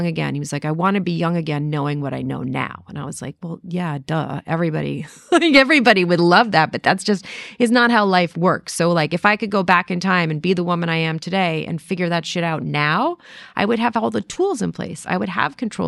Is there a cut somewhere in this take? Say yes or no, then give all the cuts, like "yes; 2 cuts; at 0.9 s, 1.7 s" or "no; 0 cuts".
no; 0 cuts